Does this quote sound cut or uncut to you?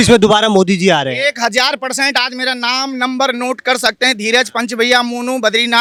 uncut